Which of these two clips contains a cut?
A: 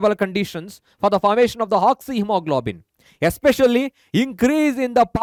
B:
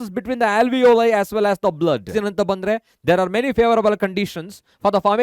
B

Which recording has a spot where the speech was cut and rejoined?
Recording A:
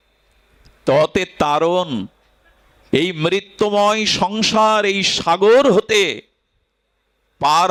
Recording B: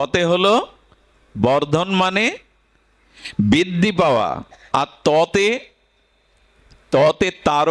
B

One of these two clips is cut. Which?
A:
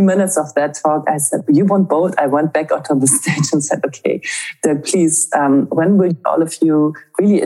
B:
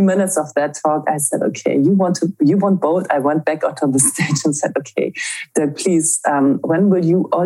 A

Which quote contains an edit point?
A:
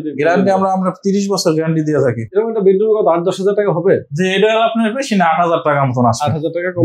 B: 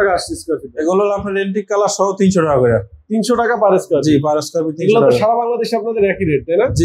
A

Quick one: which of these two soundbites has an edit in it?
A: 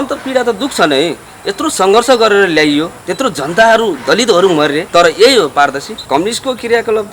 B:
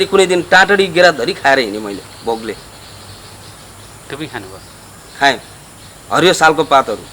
A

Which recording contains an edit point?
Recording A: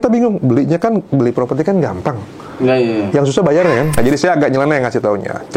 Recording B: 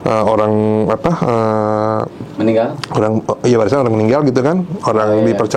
A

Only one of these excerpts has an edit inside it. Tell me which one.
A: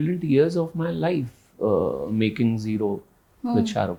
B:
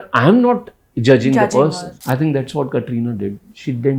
B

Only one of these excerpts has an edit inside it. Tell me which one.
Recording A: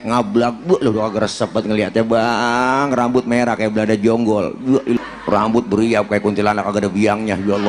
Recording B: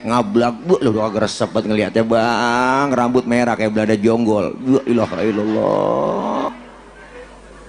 A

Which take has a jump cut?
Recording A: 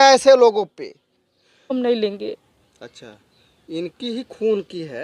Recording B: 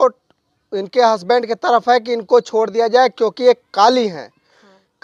A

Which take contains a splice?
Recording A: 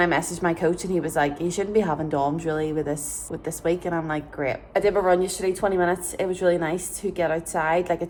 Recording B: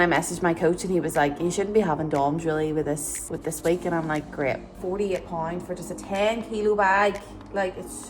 B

